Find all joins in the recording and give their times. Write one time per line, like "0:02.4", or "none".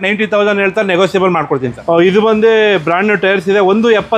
0:01.7